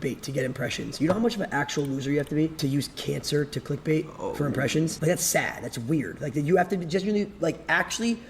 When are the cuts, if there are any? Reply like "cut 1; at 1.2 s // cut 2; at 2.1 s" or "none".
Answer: cut 1; at 2.5 s // cut 2; at 5.0 s // cut 3; at 6.3 s